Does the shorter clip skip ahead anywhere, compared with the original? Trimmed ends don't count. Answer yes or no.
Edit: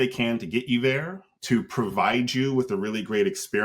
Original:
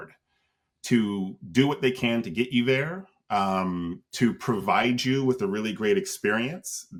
yes